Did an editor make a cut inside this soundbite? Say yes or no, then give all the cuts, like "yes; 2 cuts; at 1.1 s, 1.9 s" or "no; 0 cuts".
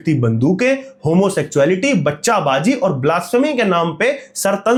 no; 0 cuts